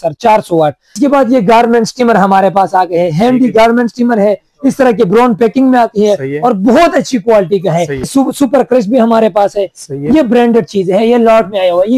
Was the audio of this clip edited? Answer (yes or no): yes